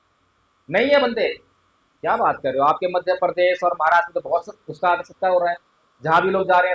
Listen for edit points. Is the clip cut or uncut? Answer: uncut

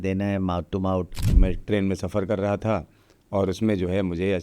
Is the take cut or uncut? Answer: cut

